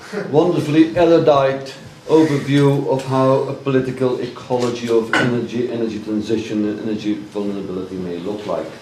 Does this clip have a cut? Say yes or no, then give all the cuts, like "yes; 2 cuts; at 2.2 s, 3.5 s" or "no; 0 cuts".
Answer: no; 0 cuts